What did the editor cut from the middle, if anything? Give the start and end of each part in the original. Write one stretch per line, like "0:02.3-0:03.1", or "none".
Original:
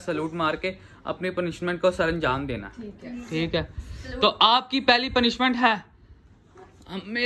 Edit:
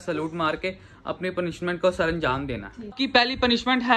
0:02.9-0:04.7

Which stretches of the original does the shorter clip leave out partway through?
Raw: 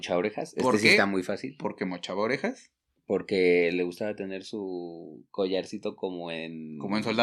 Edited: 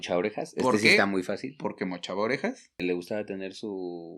0:02.8-0:03.7

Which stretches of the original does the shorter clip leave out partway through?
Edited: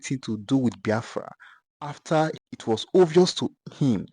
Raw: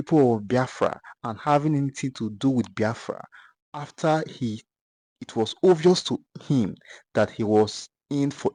0:04.3-0:05.1

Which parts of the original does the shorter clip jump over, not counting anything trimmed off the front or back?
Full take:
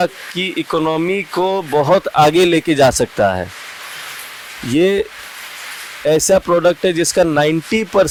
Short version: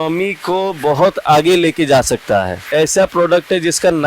0:03.5-0:05.9

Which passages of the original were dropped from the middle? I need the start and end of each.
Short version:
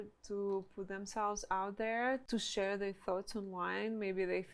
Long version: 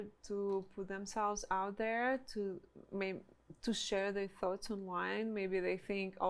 0:02.2-0:03.6

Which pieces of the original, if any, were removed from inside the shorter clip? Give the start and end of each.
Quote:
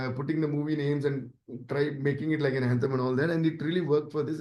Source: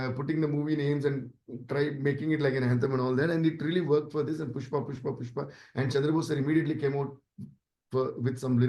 none

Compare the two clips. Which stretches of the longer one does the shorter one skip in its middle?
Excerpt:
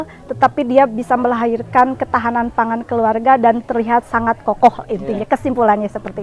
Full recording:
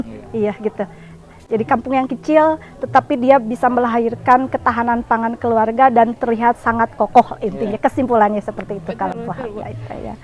none

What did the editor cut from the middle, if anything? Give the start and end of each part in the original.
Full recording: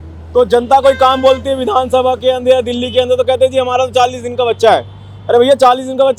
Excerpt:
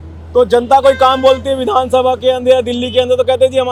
none

